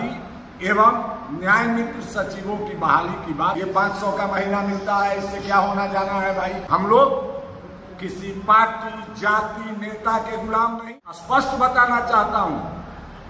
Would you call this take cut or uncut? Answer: cut